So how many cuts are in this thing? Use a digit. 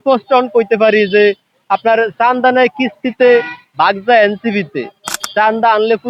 0